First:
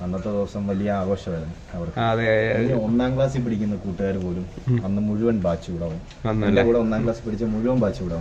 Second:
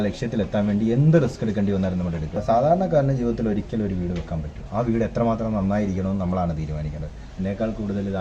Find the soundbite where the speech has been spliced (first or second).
second